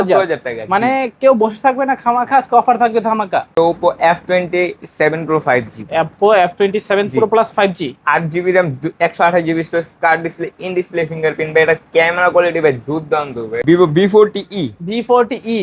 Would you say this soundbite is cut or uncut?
cut